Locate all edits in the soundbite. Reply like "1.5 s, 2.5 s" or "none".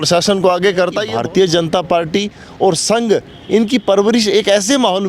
1.0 s